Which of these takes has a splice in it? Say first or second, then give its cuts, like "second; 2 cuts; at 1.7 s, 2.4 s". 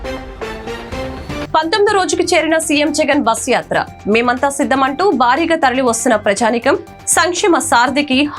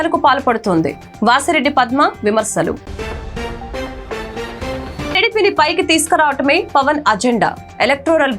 first; 1 cut; at 1.4 s